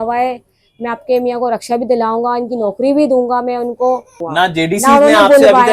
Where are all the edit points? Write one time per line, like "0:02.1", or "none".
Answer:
0:04.3